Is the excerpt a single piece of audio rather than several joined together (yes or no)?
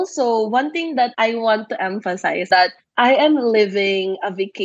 no